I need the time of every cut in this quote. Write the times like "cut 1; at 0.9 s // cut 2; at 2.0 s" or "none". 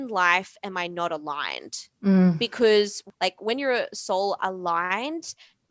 cut 1; at 3.0 s